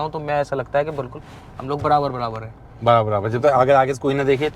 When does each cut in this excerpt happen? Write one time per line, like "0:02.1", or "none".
none